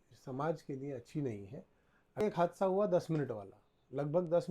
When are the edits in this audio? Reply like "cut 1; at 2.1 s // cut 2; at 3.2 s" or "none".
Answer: cut 1; at 2.2 s

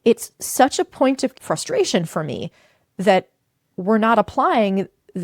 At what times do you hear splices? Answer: cut 1; at 1.4 s

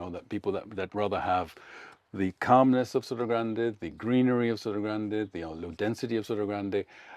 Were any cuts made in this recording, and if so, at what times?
none

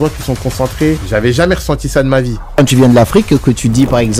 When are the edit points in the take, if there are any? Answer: cut 1; at 1.0 s // cut 2; at 2.6 s

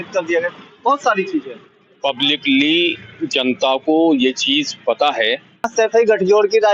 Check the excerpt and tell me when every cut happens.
cut 1; at 5.7 s

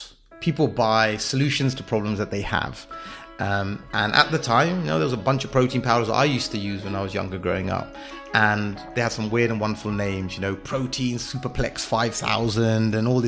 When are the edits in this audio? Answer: none

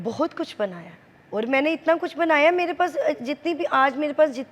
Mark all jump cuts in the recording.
none

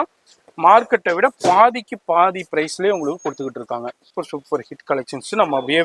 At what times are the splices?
cut 1; at 4.1 s

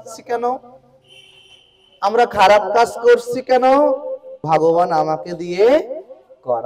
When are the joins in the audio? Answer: cut 1; at 4.4 s

